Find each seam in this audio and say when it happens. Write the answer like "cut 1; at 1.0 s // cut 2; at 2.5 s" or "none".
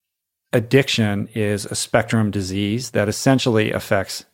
cut 1; at 1.3 s // cut 2; at 2.8 s